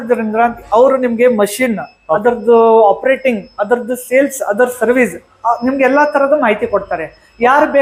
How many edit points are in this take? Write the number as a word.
zero